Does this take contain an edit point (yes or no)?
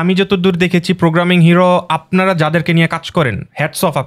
no